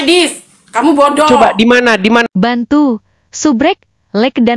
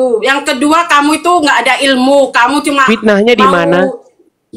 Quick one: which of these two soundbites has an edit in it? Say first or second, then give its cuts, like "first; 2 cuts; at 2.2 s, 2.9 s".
first; 1 cut; at 2.3 s